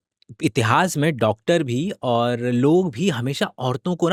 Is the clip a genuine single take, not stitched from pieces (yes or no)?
yes